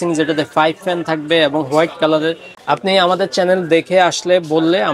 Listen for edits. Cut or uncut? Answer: cut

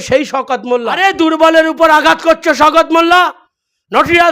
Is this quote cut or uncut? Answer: cut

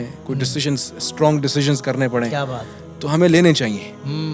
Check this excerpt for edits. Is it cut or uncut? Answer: uncut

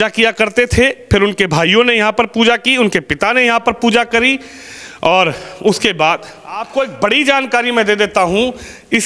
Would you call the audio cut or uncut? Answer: cut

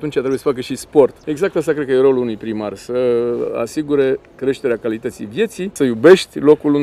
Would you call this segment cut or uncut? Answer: cut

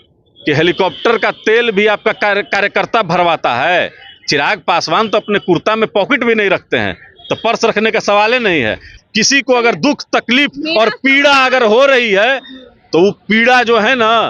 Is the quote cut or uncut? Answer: cut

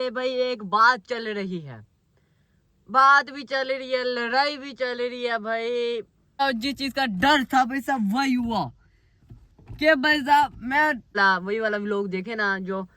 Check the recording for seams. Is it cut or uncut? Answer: cut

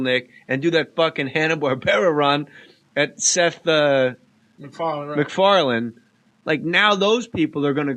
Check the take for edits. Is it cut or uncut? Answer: cut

